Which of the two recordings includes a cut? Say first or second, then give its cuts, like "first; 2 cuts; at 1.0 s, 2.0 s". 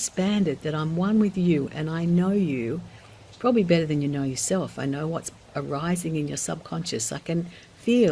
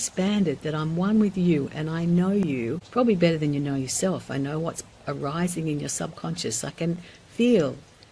second; 1 cut; at 2.8 s